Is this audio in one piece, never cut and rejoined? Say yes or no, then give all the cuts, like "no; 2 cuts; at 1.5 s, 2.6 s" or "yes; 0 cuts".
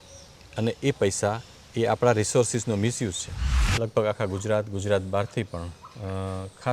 no; 1 cut; at 3.6 s